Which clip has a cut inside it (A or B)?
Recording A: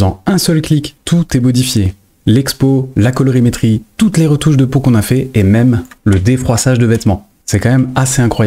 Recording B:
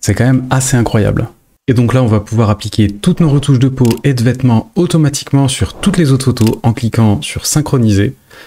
A